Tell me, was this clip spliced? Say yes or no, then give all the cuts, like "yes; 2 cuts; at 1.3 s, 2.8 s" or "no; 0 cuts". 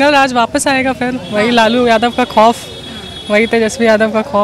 no; 0 cuts